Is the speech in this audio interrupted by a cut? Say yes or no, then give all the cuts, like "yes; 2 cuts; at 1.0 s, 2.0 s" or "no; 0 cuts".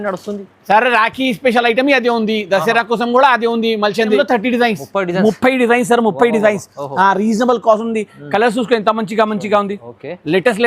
yes; 1 cut; at 4.2 s